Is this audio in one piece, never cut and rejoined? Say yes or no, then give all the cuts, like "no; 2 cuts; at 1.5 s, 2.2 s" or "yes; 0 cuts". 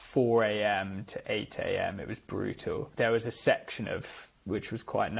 no; 1 cut; at 2.9 s